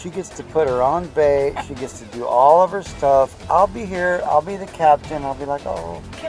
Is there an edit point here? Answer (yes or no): no